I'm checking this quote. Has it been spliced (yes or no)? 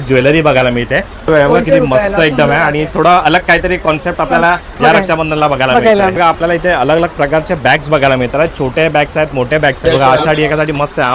yes